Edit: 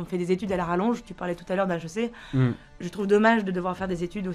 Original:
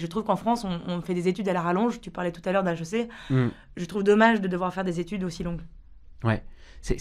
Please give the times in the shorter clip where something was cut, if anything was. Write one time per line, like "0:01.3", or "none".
none